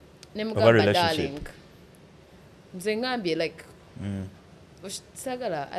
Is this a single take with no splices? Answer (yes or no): yes